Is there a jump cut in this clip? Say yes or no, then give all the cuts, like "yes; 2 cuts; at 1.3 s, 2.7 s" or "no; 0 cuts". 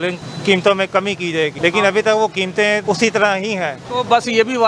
yes; 3 cuts; at 1.5 s, 2.8 s, 3.8 s